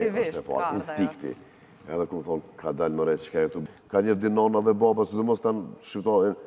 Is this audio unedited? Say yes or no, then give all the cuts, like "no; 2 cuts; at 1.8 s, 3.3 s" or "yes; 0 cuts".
no; 1 cut; at 3.6 s